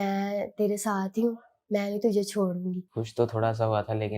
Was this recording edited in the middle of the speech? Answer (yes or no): yes